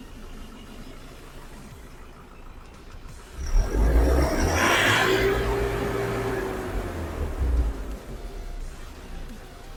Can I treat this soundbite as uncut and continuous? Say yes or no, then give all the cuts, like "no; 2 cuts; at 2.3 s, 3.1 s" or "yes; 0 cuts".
yes; 0 cuts